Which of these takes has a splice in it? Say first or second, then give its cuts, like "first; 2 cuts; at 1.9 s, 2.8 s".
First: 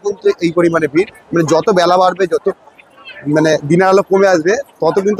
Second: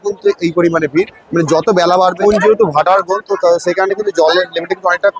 second; 1 cut; at 2.2 s